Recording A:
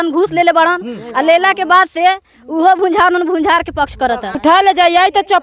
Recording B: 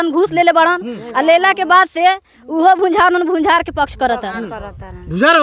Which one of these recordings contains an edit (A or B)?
A